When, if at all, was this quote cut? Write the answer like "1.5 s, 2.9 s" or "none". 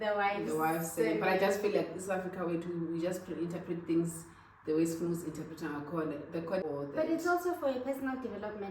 6.6 s